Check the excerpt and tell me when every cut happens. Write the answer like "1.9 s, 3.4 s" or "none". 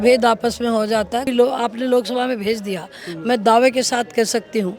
1.3 s